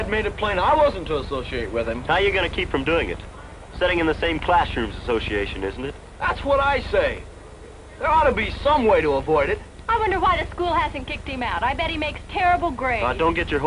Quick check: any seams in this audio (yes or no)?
yes